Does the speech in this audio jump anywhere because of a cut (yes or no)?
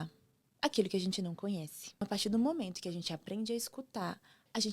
yes